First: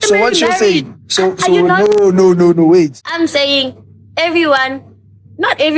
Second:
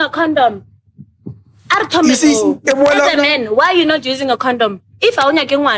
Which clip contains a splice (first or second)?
first